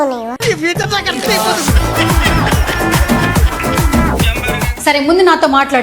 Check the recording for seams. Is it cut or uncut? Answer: cut